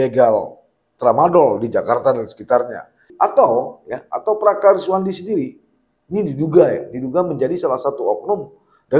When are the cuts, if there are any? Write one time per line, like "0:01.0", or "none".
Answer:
0:03.0